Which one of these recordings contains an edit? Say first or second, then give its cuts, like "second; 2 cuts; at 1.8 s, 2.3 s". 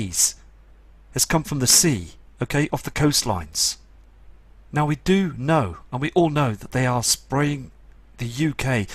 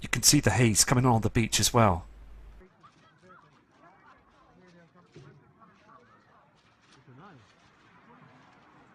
first; 1 cut; at 6.3 s